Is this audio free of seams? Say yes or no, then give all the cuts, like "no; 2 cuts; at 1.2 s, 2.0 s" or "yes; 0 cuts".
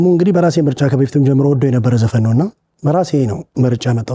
yes; 0 cuts